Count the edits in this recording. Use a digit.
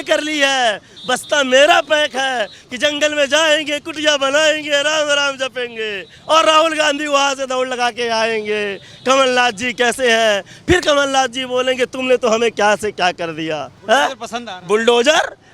3